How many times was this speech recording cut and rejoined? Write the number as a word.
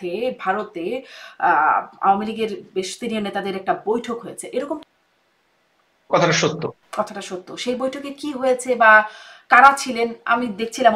one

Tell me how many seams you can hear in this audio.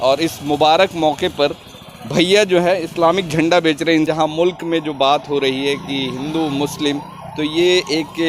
one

